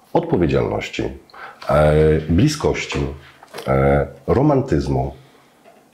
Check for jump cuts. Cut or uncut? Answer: uncut